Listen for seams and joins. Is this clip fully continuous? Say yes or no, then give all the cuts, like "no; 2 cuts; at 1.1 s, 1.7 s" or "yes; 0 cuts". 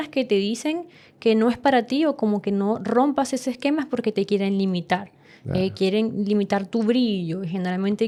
yes; 0 cuts